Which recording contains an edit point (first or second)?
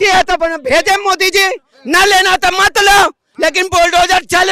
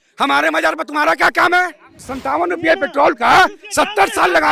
second